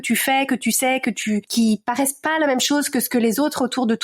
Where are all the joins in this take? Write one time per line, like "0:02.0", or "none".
0:01.5